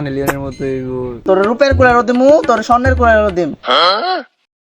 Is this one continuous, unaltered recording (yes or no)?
no